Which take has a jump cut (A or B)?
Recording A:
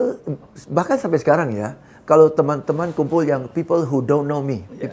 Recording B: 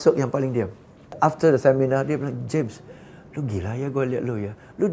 B